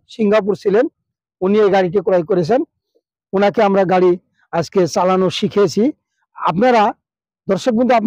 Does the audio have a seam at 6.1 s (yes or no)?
no